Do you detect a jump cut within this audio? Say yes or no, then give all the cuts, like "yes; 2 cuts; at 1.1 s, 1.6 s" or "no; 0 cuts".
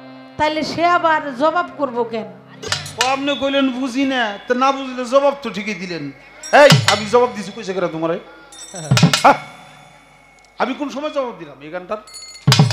yes; 1 cut; at 2.7 s